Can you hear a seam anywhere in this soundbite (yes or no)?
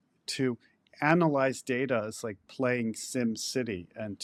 no